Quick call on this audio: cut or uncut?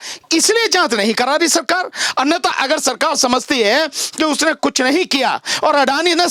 uncut